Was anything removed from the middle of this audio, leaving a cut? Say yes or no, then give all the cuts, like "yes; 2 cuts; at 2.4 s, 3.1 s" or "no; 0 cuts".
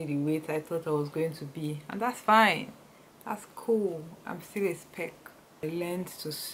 yes; 1 cut; at 5.6 s